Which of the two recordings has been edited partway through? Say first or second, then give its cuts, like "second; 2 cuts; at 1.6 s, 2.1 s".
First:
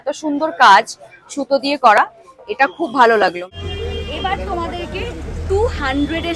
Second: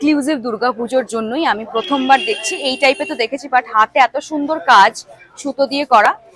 first; 1 cut; at 3.4 s